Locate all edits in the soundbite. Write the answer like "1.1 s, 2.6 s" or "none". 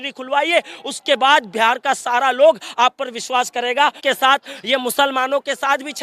4.0 s